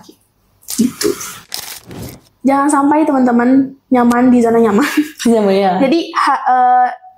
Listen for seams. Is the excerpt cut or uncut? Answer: cut